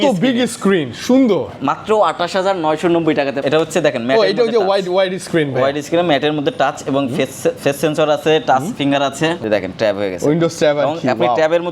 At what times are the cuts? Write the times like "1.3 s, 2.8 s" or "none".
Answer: 3.4 s, 9.4 s